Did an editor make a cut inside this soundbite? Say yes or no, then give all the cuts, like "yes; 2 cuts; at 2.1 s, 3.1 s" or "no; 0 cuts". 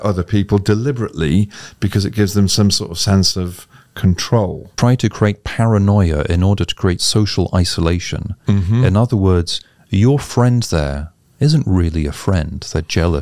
yes; 1 cut; at 4.7 s